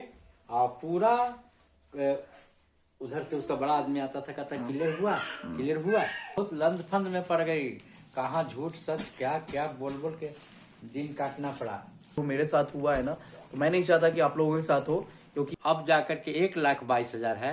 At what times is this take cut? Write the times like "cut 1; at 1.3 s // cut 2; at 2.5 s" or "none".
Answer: cut 1; at 6.3 s // cut 2; at 12.1 s // cut 3; at 15.5 s